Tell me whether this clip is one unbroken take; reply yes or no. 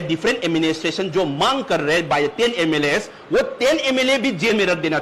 yes